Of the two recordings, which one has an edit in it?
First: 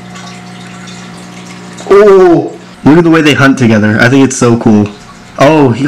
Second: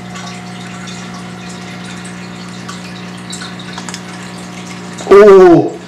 first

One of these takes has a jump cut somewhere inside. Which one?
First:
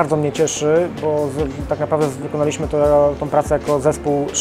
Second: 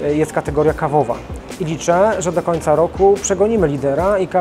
second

